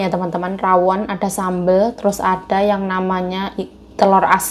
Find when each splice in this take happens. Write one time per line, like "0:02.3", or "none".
none

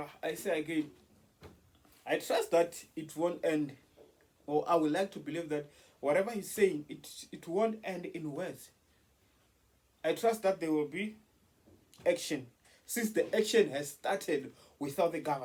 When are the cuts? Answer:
none

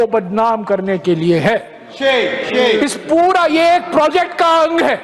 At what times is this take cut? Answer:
none

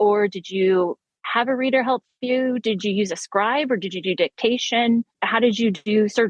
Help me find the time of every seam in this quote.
0:05.2

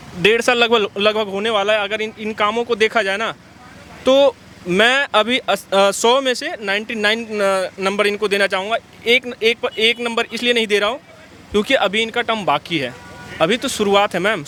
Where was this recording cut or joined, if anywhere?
none

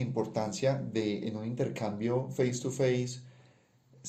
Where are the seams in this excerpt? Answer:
none

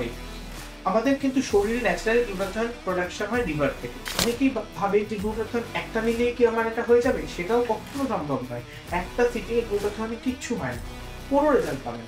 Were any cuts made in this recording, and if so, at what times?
0:04.2

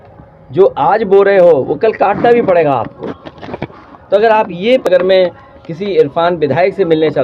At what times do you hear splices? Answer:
0:04.9

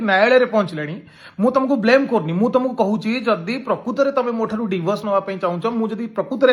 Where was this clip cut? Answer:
none

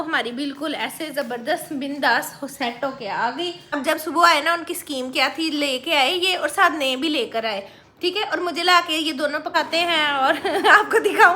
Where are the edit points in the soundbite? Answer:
0:03.8
0:09.5

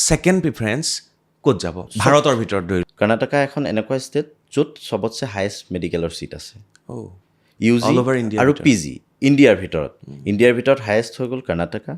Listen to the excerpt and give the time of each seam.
0:01.9
0:02.9

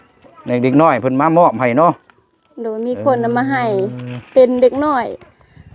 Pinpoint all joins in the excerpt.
none

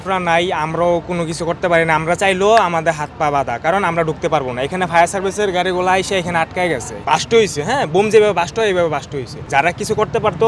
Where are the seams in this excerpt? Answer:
0:06.9
0:09.3

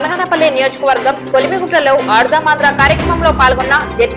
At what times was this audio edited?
none

